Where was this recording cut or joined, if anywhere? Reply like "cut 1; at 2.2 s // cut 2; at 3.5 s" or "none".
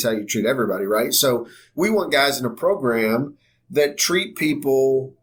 none